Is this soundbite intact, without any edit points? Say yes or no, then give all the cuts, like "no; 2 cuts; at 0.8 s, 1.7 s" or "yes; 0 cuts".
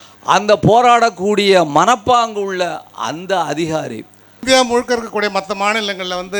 no; 1 cut; at 4.4 s